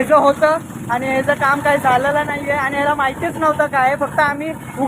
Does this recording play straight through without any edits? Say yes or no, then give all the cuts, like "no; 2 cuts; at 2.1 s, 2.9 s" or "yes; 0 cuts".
yes; 0 cuts